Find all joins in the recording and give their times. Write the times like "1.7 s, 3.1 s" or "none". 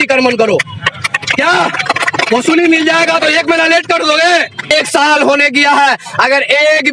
4.7 s